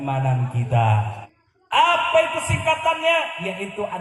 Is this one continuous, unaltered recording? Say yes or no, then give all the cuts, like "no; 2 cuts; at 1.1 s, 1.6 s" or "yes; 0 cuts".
no; 1 cut; at 1.2 s